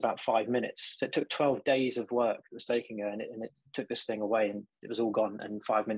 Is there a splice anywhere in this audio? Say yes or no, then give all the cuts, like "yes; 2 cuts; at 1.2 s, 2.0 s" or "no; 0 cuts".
no; 0 cuts